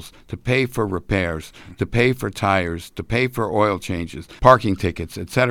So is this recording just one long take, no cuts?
no; 1 cut; at 4.2 s

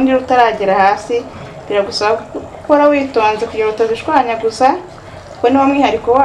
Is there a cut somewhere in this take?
no; 0 cuts

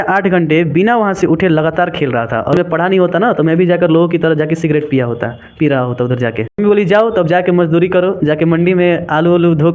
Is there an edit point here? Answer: yes; 2 cuts; at 2.5 s, 6.6 s

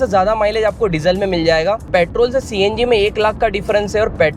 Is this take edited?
yes; 1 cut; at 1.9 s

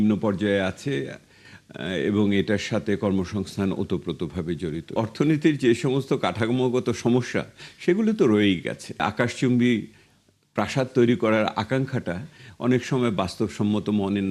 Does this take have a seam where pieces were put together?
yes; 2 cuts; at 5.0 s, 9.1 s

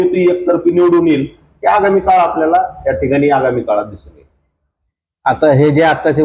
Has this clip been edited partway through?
no; 0 cuts

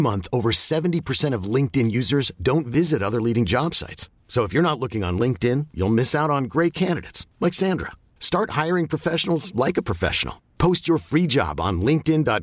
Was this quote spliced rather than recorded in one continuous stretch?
no; 0 cuts

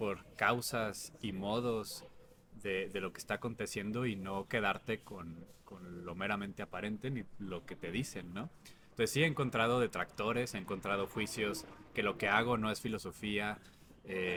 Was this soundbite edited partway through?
no; 0 cuts

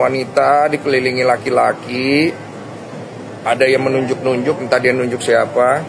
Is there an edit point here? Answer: no; 0 cuts

